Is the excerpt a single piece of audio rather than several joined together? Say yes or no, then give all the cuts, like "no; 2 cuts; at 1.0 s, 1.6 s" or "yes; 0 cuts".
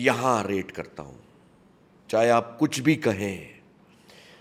yes; 0 cuts